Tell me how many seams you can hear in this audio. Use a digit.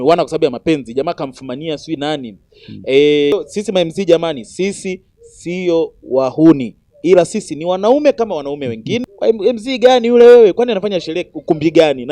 2